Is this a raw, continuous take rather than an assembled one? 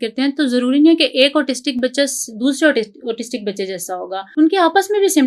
no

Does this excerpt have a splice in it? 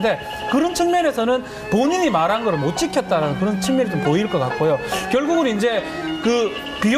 no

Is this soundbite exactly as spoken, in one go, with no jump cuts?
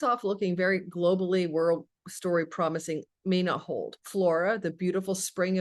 no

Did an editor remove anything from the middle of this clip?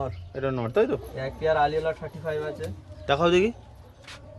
yes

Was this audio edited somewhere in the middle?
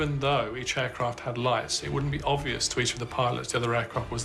no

